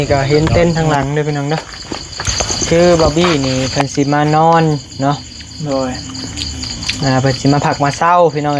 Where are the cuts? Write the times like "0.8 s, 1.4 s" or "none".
2.6 s